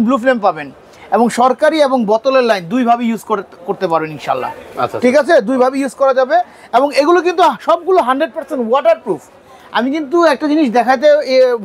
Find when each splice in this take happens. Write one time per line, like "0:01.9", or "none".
none